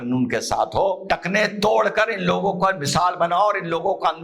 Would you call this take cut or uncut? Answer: cut